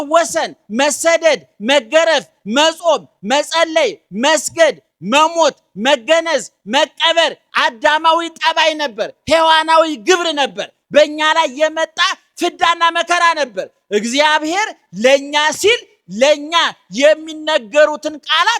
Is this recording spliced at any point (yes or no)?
no